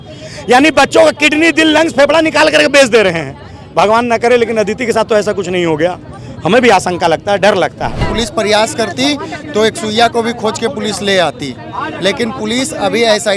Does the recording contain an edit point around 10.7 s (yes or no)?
no